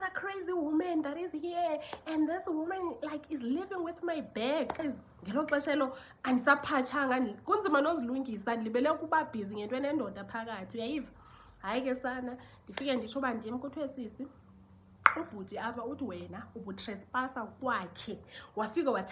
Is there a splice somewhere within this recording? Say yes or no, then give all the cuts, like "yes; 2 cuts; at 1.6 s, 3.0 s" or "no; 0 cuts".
yes; 1 cut; at 4.8 s